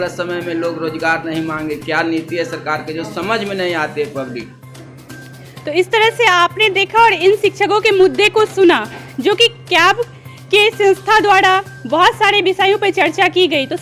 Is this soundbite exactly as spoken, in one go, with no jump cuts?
yes; 0 cuts

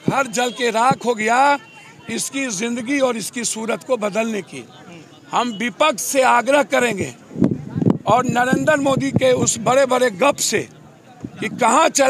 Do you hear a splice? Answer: no; 0 cuts

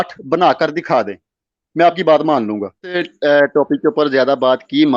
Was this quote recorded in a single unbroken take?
no; 1 cut; at 3.1 s

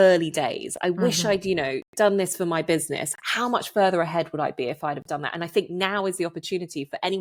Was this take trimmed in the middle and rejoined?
no; 0 cuts

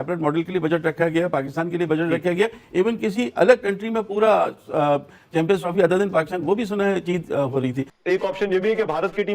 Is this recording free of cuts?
no; 1 cut; at 7.9 s

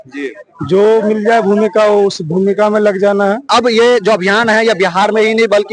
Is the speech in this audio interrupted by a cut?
yes; 1 cut; at 3.5 s

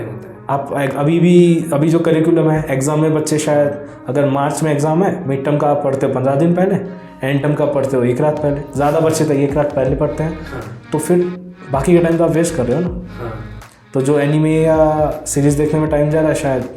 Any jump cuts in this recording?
no; 0 cuts

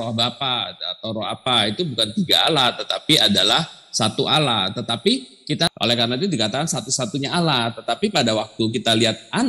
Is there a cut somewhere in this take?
yes; 1 cut; at 5.7 s

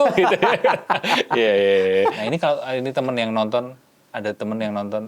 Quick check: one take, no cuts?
no; 1 cut; at 2.2 s

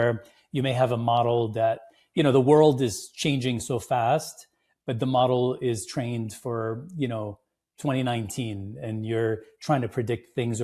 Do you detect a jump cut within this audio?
no; 0 cuts

